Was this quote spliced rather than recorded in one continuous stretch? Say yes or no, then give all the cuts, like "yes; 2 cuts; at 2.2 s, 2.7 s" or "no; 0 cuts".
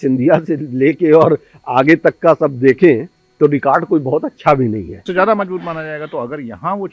yes; 1 cut; at 5.0 s